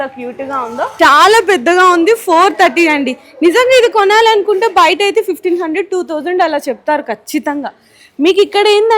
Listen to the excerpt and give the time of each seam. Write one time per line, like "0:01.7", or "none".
none